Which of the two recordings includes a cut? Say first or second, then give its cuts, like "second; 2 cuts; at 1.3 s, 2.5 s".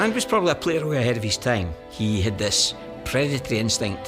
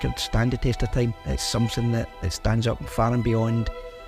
first; 1 cut; at 1.8 s